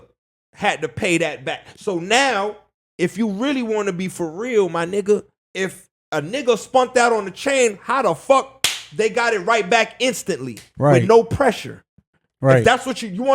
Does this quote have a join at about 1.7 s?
no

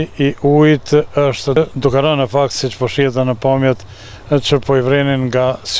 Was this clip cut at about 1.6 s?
yes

